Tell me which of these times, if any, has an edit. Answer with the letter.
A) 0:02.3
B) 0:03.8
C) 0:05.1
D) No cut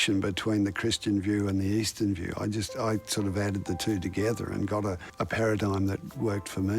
C